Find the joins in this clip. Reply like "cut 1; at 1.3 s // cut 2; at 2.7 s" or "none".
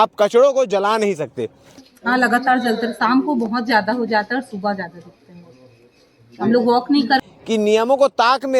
cut 1; at 1.8 s // cut 2; at 7.3 s